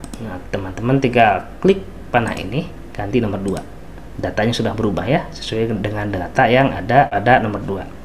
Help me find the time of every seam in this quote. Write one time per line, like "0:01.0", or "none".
0:07.1